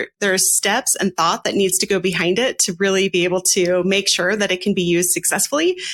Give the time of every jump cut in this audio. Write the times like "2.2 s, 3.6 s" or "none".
none